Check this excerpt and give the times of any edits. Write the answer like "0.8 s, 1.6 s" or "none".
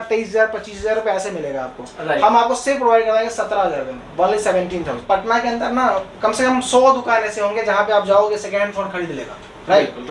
5.0 s